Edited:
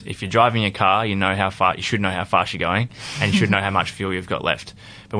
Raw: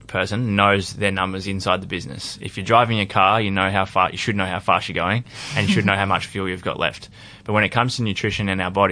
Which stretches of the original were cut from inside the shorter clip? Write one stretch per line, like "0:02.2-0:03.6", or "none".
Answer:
none